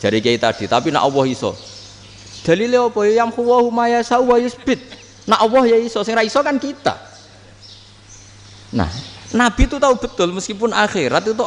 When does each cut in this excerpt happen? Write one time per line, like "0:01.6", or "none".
none